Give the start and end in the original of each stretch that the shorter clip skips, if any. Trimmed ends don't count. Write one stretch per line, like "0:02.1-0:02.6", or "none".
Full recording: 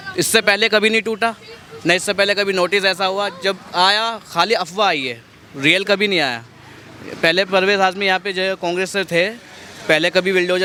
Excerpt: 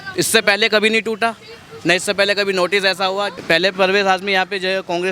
0:03.3-0:07.1

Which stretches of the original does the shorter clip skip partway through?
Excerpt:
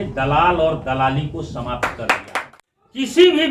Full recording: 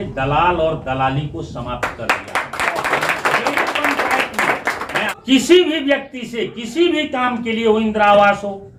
0:02.6-0:04.9

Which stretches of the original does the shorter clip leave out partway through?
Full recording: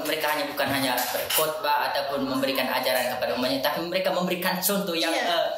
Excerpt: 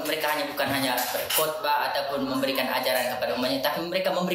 none

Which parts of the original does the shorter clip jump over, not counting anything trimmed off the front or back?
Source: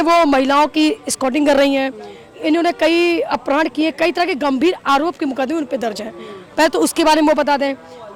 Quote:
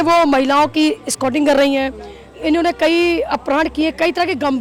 none

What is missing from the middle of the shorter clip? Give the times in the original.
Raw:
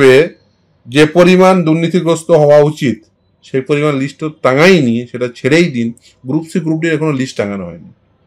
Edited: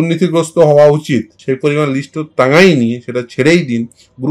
0:03.1-0:03.4

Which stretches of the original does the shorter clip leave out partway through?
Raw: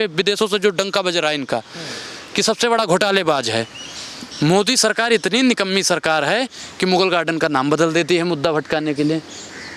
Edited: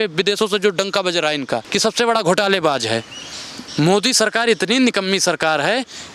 0:01.7-0:02.3

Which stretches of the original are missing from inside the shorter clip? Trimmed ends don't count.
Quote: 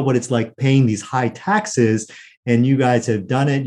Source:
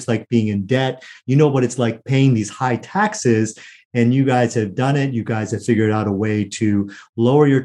none

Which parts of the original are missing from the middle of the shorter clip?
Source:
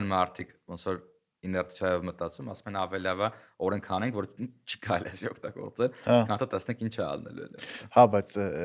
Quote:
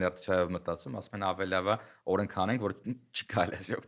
none

